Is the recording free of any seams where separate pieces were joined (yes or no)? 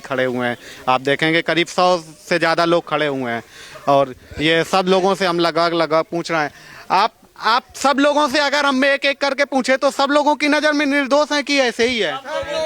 yes